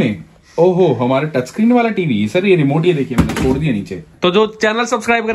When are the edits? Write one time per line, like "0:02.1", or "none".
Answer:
0:04.0